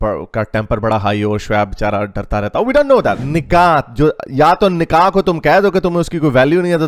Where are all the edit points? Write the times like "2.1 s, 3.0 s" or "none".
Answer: 3.2 s